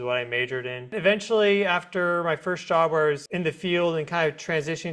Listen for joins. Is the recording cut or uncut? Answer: cut